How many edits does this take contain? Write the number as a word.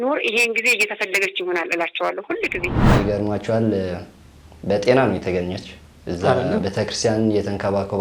one